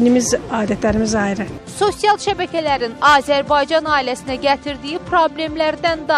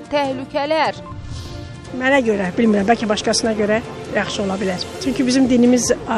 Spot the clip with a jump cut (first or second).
second